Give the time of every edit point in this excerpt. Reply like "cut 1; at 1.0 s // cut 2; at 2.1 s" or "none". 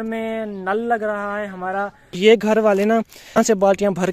cut 1; at 2.2 s // cut 2; at 3.4 s